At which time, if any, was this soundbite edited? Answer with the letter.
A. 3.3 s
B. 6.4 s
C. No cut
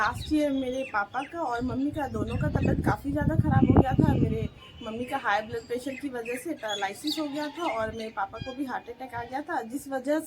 B